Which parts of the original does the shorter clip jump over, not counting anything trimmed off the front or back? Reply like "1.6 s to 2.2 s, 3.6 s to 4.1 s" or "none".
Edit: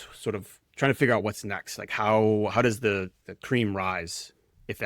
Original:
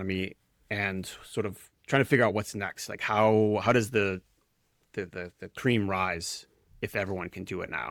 4.4 s to 5.4 s